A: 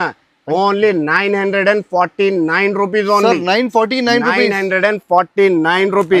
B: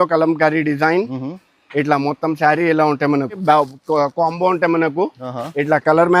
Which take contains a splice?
B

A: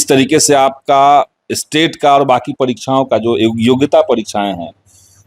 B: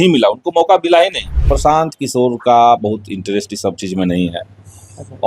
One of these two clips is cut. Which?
B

